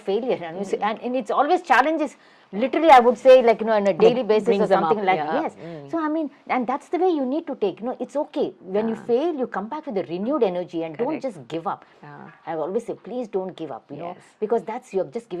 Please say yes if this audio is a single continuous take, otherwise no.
yes